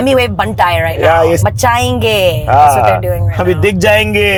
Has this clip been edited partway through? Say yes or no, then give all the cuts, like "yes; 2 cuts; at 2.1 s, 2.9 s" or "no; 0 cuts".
no; 0 cuts